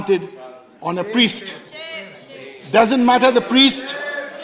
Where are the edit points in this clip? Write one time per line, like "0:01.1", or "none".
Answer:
none